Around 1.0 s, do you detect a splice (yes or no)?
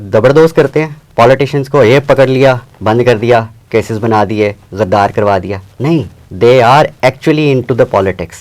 yes